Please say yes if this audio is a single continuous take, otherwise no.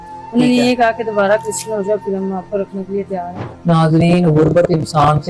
no